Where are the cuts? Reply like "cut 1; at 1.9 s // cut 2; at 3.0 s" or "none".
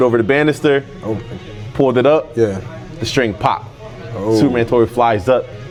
none